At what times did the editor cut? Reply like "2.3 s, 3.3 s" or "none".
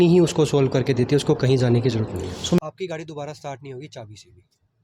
2.6 s